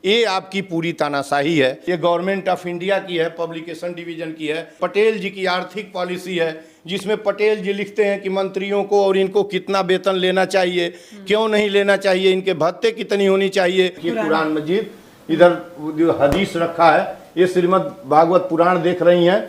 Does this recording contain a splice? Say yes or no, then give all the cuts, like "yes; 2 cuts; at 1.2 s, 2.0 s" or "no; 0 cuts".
yes; 3 cuts; at 1.8 s, 4.7 s, 14.0 s